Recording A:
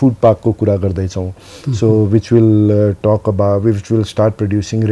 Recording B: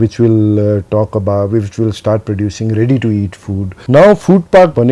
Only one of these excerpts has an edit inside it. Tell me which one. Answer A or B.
B